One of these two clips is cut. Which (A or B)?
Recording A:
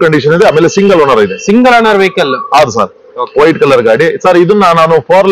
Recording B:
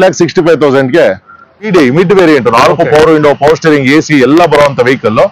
B